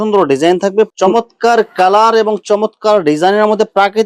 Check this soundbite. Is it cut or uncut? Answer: cut